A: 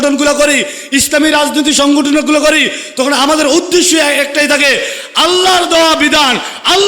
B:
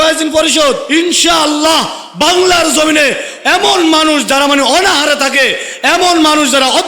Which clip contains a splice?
B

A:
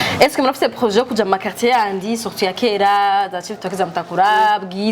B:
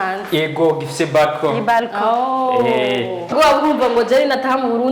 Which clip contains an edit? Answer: B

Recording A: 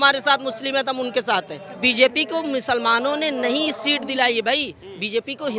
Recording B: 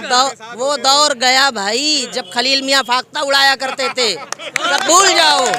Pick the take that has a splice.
A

